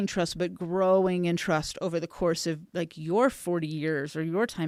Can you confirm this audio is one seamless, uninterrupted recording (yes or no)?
yes